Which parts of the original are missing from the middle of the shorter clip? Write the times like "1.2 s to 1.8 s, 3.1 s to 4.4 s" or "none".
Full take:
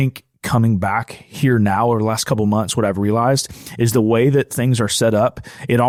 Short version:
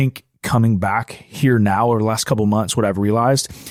none